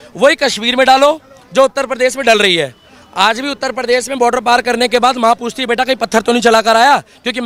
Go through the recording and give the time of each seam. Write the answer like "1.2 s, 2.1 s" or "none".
none